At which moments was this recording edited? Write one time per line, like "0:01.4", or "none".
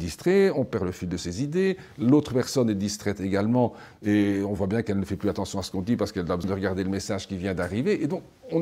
0:06.4